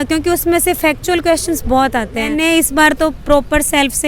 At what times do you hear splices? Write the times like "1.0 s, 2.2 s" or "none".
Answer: 2.3 s